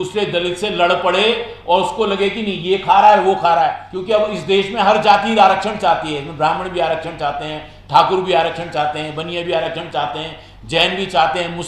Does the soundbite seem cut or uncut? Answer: cut